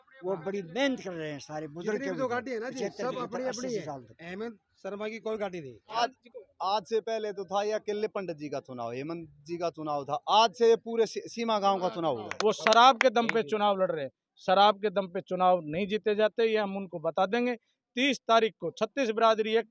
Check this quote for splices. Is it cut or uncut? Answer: cut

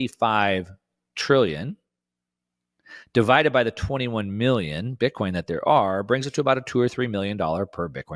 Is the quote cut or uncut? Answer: uncut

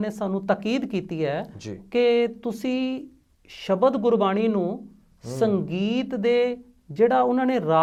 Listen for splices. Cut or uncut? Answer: uncut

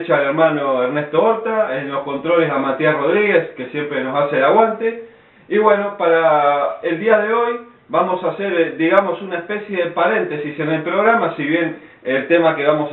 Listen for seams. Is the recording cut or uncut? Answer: uncut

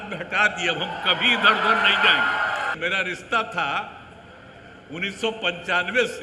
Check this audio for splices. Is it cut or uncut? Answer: cut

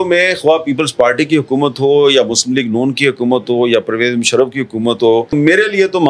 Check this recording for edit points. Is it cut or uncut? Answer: uncut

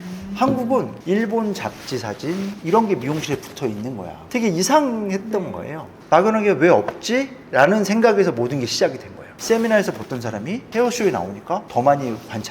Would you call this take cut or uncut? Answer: cut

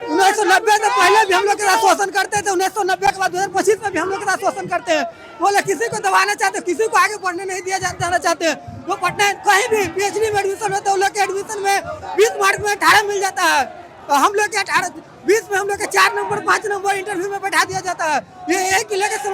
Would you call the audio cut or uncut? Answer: uncut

